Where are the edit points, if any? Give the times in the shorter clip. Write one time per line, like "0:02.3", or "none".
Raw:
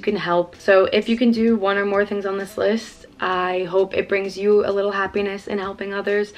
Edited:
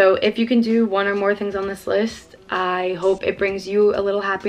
none